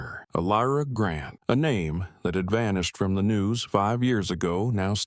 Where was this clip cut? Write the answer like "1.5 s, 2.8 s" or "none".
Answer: 1.3 s